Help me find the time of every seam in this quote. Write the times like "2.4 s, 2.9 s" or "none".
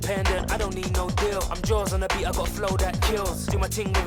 none